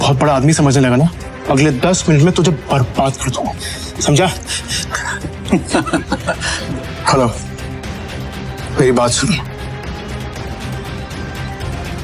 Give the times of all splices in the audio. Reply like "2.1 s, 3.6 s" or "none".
1.3 s, 6.5 s, 10.3 s